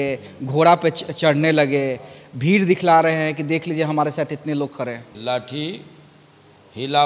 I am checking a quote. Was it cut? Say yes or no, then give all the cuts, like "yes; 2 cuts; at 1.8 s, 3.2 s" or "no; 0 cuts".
no; 0 cuts